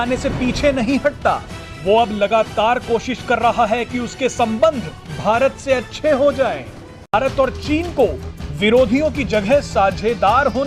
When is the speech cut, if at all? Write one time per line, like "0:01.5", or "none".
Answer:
0:07.1